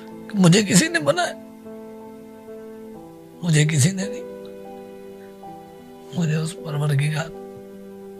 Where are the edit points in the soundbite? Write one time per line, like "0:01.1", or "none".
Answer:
none

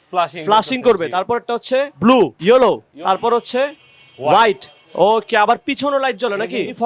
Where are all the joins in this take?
none

